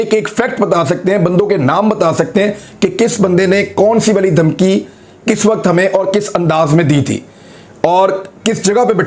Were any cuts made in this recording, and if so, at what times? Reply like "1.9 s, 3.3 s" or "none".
none